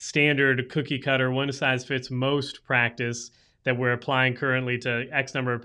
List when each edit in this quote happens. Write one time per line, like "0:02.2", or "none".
none